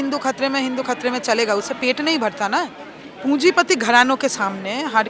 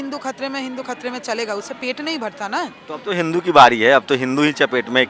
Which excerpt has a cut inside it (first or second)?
first